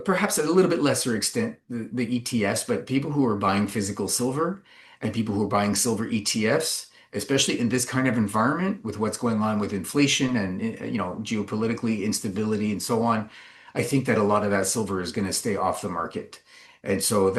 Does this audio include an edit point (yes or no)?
no